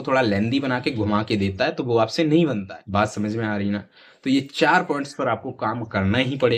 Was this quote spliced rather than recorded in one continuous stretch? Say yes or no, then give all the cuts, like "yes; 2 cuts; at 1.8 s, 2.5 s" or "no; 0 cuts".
yes; 1 cut; at 2.7 s